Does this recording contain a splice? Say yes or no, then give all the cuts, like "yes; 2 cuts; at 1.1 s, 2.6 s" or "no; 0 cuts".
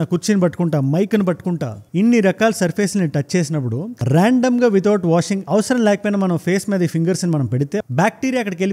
yes; 2 cuts; at 1.8 s, 7.8 s